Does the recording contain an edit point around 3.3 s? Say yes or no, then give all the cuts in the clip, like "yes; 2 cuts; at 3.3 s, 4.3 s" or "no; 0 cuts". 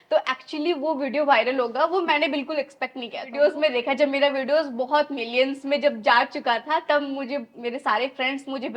yes; 1 cut; at 3.3 s